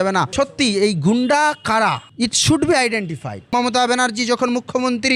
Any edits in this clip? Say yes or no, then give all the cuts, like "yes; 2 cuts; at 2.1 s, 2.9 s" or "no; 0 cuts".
yes; 1 cut; at 3.5 s